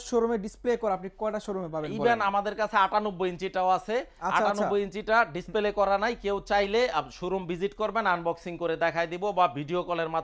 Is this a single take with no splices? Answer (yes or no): yes